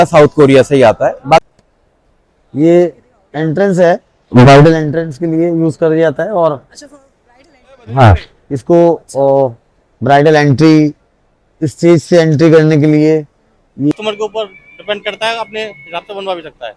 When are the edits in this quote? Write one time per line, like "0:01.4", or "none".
0:01.4
0:13.9